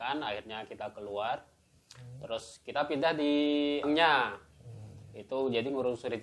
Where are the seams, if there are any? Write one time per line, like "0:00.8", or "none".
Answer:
0:03.9